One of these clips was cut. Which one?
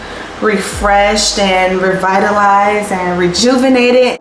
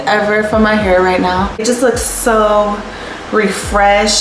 second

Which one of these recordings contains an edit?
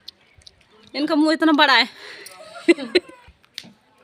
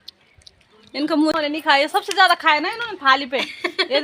second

